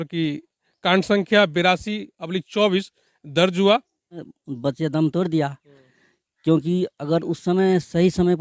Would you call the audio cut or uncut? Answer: cut